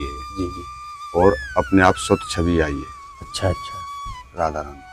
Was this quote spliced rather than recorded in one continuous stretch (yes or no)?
no